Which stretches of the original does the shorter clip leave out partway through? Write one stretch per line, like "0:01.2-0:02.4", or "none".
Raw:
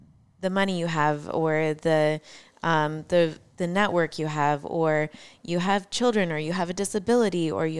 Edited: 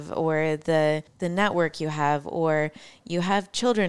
0:02.3-0:03.5